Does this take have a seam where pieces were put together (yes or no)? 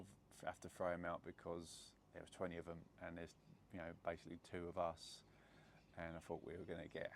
no